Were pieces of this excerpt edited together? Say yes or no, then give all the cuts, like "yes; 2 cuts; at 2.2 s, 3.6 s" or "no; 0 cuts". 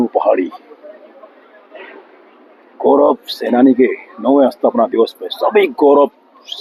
no; 0 cuts